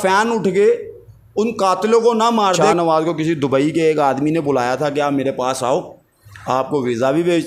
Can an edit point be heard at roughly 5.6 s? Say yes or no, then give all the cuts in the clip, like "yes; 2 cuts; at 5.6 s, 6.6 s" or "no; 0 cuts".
no; 1 cut; at 2.6 s